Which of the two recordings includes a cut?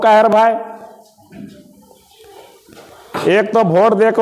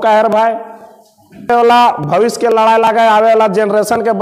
second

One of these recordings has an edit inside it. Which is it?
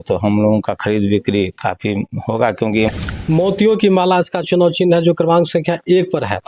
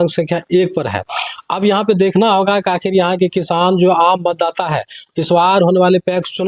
first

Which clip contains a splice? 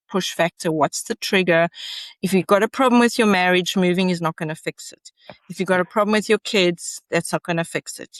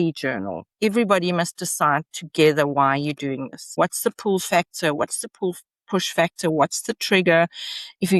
second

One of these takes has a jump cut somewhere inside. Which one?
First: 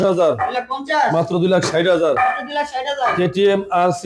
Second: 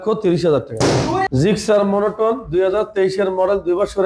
second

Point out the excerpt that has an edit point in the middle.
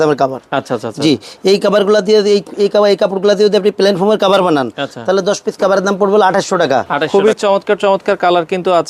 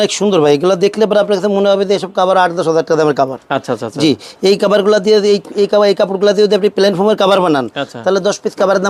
first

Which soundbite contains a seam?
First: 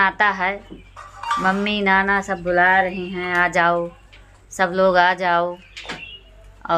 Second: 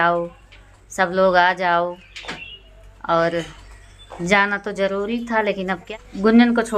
second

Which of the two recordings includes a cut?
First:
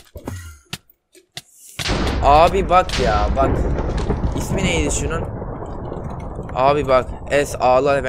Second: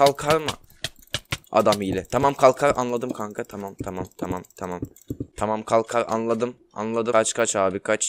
second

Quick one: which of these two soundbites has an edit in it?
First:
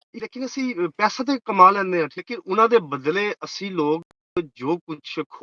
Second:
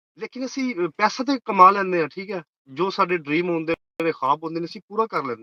first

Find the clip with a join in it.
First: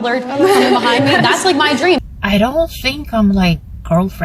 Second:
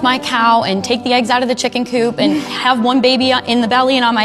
first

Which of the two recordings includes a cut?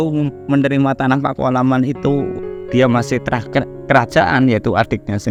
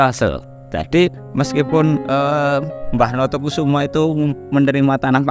second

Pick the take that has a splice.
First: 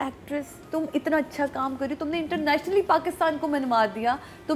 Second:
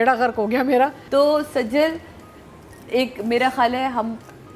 second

